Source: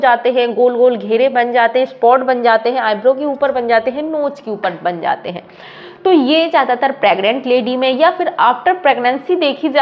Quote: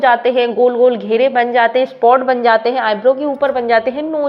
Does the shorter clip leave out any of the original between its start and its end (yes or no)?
no